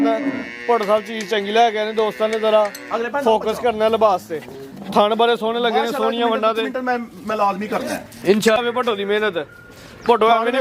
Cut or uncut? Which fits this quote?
cut